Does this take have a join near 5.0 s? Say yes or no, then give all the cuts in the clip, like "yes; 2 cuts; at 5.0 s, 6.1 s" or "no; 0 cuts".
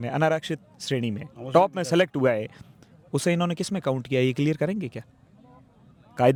no; 0 cuts